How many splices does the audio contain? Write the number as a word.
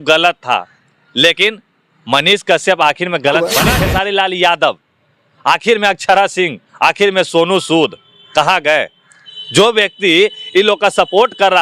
one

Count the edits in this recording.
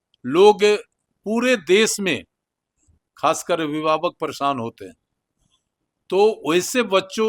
zero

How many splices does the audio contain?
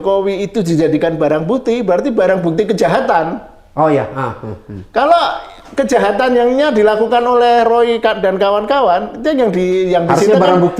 zero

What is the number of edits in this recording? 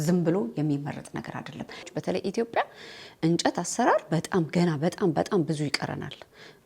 one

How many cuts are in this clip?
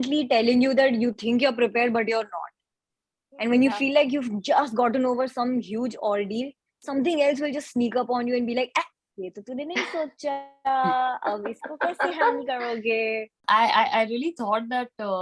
one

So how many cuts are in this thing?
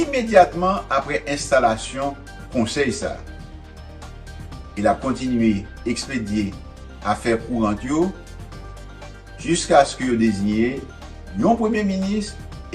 two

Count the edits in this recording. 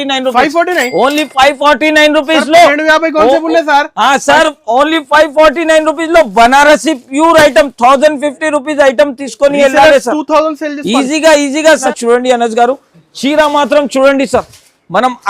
one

